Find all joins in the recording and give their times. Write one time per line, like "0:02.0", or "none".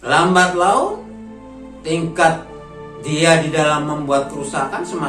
none